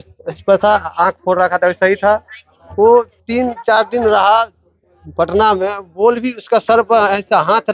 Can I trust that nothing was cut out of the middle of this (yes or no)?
yes